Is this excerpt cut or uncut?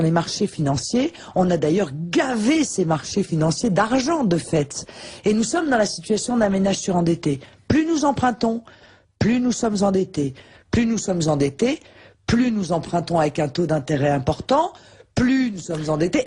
cut